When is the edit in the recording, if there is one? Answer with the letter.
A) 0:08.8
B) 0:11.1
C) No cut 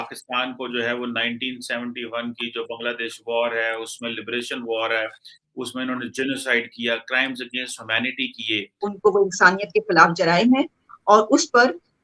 A